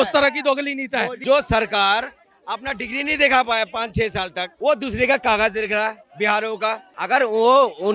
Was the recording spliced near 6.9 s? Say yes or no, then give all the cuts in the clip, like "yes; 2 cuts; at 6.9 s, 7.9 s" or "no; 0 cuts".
yes; 3 cuts; at 1.1 s, 4.4 s, 6.9 s